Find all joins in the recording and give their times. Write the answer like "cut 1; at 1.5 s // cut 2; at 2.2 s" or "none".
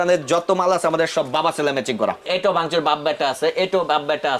cut 1; at 2.3 s